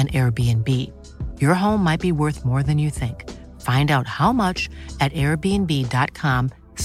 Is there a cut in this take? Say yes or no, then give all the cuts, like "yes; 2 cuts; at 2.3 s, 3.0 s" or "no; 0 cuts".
no; 0 cuts